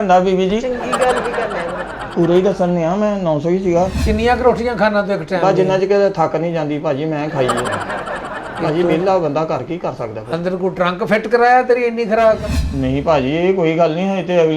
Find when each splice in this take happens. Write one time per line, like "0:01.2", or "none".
0:04.0
0:12.6